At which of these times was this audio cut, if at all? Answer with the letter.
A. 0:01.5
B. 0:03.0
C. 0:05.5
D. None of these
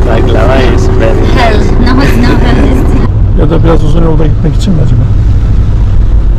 B